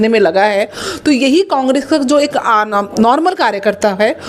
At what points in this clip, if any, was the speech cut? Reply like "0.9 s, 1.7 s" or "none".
none